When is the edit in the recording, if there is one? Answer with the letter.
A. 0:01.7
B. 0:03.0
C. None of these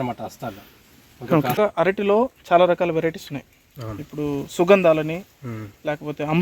A